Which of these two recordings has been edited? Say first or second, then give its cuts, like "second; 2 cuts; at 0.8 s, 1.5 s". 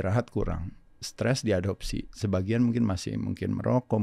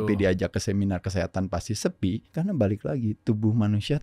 second; 1 cut; at 2.3 s